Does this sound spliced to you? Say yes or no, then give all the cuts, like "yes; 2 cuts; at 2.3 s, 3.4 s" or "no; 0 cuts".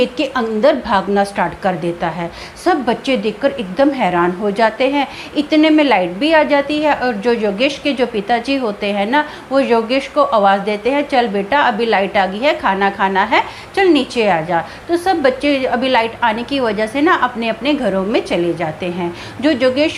no; 0 cuts